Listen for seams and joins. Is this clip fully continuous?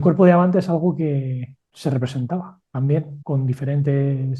yes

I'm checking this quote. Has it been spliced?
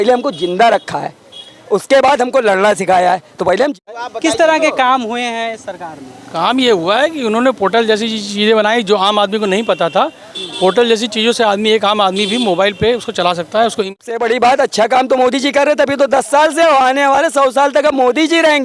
yes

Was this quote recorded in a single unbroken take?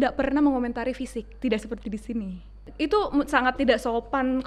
no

